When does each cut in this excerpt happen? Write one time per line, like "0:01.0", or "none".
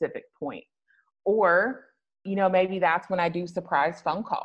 0:02.2